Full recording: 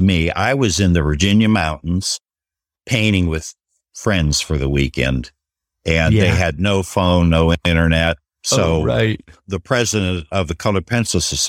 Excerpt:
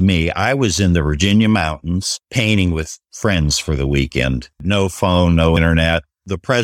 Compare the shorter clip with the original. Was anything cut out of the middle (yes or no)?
yes